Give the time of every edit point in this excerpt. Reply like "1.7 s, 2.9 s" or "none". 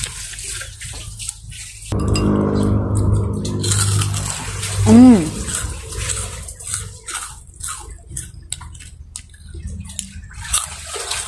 1.9 s